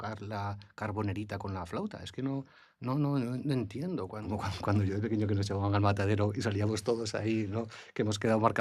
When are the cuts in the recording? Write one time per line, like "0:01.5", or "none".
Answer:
0:04.2